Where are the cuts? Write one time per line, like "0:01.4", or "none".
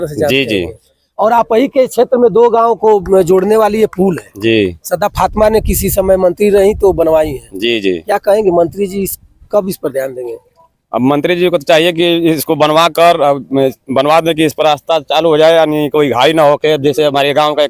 none